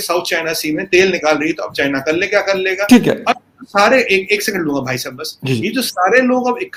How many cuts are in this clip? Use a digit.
0